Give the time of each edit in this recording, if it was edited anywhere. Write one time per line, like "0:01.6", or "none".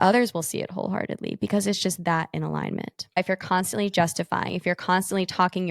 0:03.2